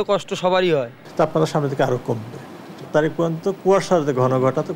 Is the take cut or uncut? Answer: cut